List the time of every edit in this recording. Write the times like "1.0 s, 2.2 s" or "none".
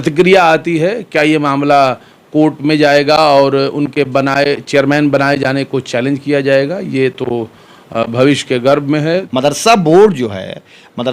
9.0 s